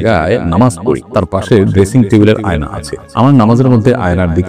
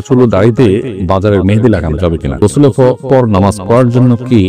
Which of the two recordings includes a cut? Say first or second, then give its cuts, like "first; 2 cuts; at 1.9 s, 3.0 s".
second; 2 cuts; at 0.9 s, 2.4 s